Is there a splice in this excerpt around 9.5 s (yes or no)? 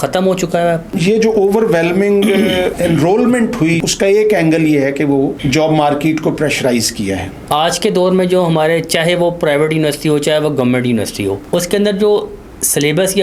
no